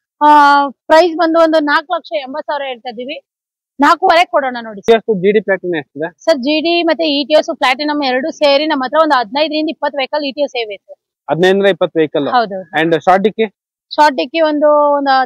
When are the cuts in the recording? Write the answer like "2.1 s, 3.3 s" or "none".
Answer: 4.8 s